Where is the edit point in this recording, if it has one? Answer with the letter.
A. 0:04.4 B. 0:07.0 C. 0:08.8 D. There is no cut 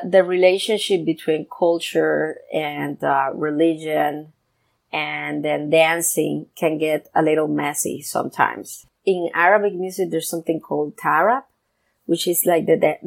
C